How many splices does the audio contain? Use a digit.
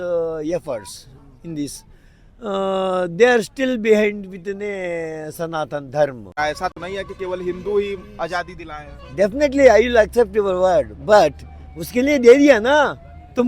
1